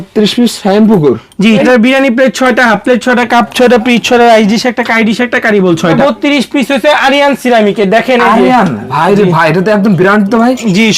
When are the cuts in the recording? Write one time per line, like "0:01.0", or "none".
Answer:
0:01.6
0:06.0